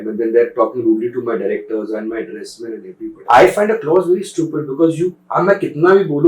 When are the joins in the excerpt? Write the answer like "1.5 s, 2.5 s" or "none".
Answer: 3.2 s